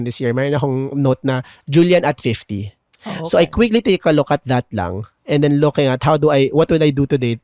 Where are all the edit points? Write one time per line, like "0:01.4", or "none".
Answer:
none